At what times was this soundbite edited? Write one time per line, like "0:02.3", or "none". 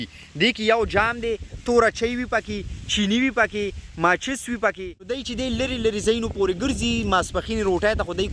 0:05.2